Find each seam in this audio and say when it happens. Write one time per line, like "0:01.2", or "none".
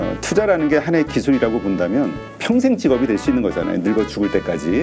0:02.3